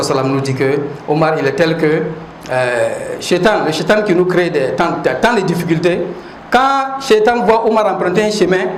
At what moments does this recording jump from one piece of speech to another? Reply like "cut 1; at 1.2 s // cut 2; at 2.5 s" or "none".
none